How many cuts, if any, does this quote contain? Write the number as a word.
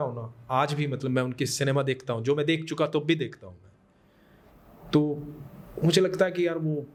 zero